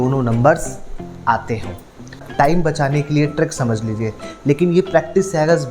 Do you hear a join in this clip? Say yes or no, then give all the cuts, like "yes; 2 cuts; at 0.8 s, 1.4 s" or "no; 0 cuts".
yes; 1 cut; at 2.2 s